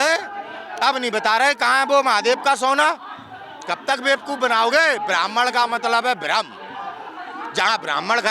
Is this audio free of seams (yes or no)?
yes